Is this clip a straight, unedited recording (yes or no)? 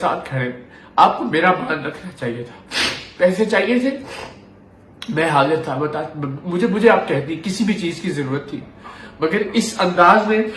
yes